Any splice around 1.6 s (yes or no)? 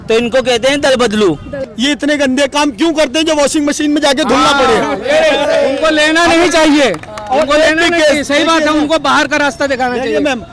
yes